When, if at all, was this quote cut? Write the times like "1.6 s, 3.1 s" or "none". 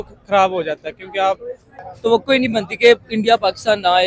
1.8 s